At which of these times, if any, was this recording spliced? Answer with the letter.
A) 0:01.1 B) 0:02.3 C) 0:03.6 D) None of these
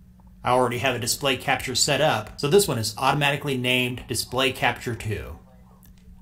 A